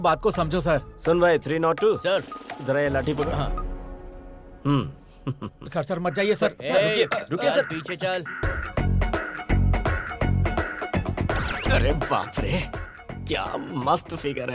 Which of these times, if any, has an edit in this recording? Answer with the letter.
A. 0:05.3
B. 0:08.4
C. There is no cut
B